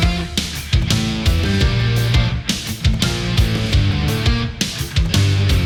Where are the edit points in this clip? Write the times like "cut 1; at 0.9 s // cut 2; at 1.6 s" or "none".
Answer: none